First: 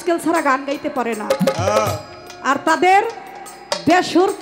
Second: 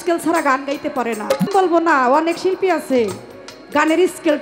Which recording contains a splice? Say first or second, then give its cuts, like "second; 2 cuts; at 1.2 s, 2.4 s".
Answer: second; 1 cut; at 1.5 s